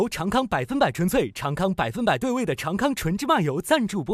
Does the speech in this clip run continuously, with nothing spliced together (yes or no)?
yes